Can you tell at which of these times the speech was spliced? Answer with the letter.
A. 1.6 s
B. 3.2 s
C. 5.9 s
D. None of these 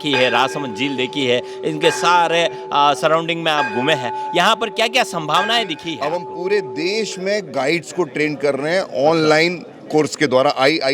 C